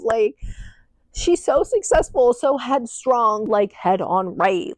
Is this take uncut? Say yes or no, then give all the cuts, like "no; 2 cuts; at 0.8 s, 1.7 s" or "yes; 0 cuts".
no; 1 cut; at 3.4 s